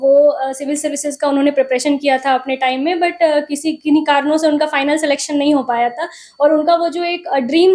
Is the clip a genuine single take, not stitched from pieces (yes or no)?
yes